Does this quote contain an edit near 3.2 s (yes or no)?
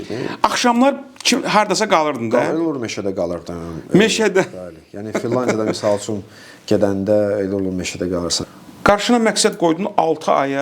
no